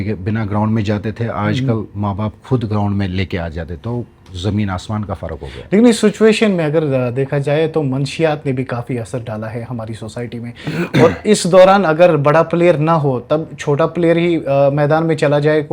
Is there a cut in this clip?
no; 0 cuts

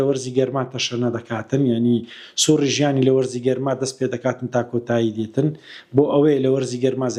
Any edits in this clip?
no; 0 cuts

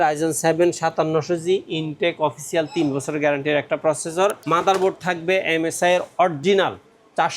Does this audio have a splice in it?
yes; 1 cut; at 4.4 s

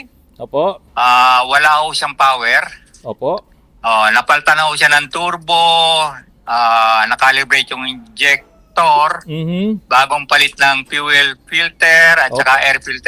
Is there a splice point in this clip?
no; 0 cuts

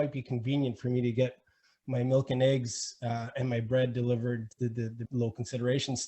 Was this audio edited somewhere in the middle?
yes; 1 cut; at 4.9 s

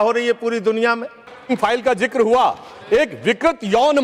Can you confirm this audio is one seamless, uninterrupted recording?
no; 1 cut; at 1.2 s

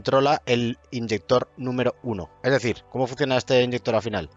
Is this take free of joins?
yes; 0 cuts

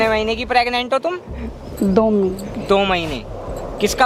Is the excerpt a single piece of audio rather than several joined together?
yes; 0 cuts

